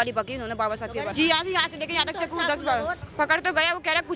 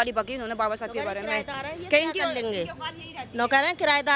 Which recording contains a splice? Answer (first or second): first